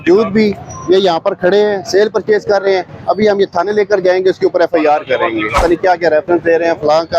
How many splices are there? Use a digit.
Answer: 1